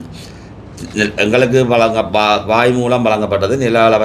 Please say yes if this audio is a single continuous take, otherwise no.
yes